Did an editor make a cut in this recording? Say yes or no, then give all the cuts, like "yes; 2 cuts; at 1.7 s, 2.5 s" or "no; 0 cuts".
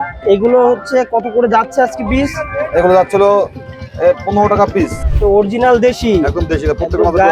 yes; 1 cut; at 5.0 s